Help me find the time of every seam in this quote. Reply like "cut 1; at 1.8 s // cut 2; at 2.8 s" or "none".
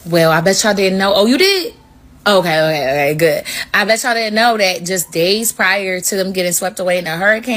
none